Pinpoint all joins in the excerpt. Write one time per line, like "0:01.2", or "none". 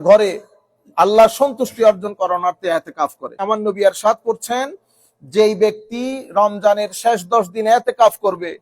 0:03.4

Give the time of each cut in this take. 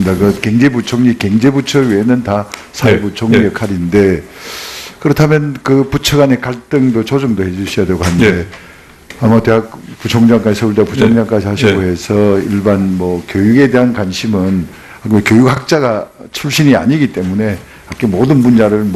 0:15.4

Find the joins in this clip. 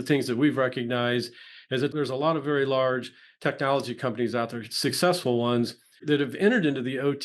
0:01.9
0:06.0

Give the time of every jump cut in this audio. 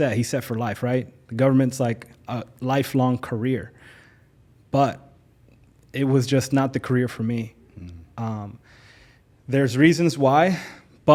none

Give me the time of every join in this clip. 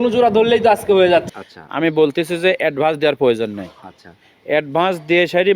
0:01.3

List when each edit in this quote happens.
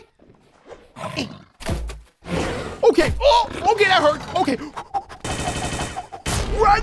none

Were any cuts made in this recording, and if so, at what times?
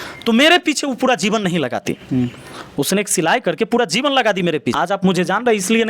0:04.8

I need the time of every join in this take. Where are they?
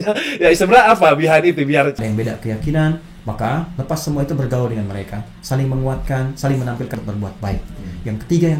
0:02.0
0:07.0

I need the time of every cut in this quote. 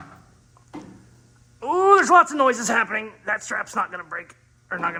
none

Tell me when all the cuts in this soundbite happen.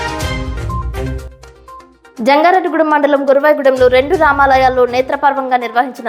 0:01.0

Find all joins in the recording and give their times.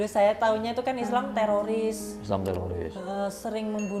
none

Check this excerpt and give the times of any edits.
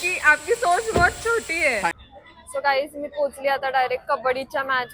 0:02.0

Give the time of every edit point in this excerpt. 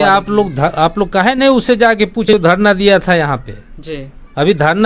0:02.3

